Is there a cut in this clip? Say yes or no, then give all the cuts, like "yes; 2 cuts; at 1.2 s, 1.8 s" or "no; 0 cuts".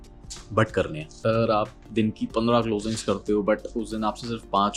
yes; 1 cut; at 1.2 s